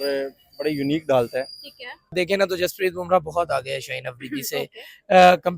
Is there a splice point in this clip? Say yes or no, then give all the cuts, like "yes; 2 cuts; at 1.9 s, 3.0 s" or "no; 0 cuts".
yes; 1 cut; at 2.1 s